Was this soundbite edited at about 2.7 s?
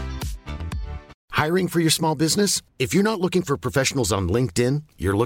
no; 1 cut; at 1.2 s

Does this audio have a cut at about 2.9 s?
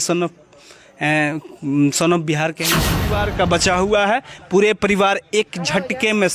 yes; 1 cut; at 2.9 s

